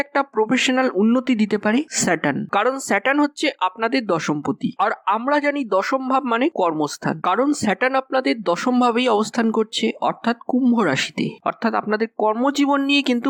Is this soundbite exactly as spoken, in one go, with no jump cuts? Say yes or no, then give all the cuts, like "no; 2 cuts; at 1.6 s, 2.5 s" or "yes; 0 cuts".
yes; 0 cuts